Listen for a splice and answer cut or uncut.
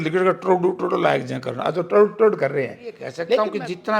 cut